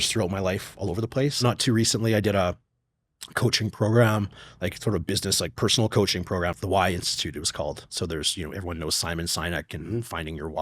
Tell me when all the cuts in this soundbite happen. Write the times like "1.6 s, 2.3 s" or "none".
1.4 s, 6.6 s